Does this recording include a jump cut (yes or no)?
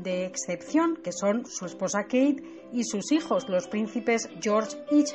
no